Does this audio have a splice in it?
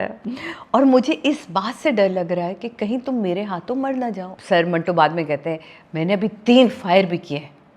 yes; 1 cut; at 4.3 s

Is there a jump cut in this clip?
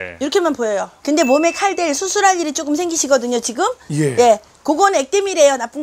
yes; 1 cut; at 0.9 s

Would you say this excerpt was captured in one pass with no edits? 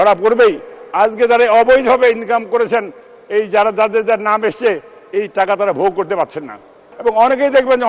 no; 1 cut; at 6.9 s

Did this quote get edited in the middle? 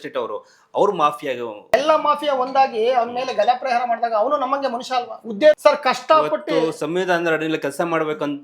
yes; 2 cuts; at 1.7 s, 5.6 s

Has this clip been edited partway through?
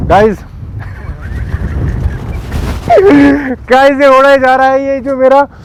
no; 0 cuts

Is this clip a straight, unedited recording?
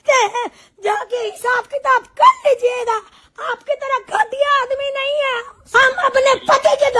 no; 1 cut; at 5.5 s

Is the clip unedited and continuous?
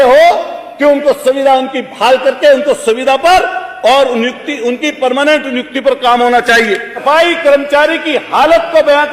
no; 1 cut; at 7.0 s

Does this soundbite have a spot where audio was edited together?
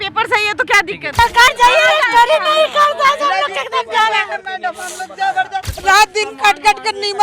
yes; 2 cuts; at 1.2 s, 5.7 s

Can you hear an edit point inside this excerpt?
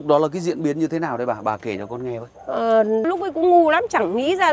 yes; 1 cut; at 3.0 s

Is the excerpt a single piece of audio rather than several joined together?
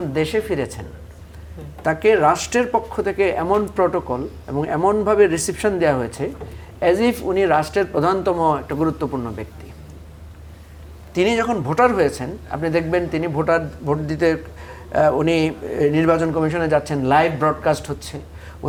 yes; 0 cuts

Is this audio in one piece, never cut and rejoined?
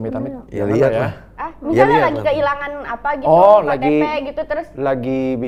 yes; 0 cuts

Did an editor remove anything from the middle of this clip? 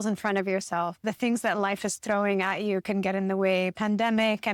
yes; 1 cut; at 1.0 s

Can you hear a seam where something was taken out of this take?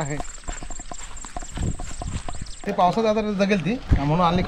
yes; 1 cut; at 2.7 s

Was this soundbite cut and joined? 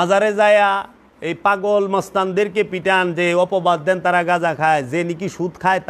no; 0 cuts

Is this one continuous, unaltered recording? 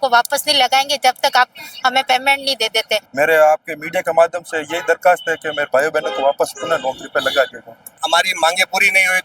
no; 2 cuts; at 3.1 s, 8.0 s

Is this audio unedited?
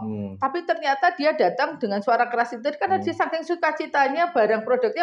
yes; 0 cuts

